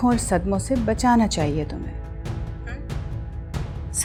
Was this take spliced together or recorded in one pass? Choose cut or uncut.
uncut